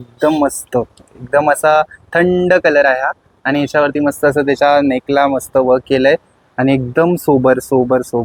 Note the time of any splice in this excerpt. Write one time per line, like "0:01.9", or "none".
none